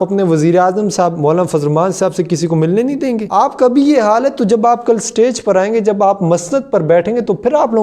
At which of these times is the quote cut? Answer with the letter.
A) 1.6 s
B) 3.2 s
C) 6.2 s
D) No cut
B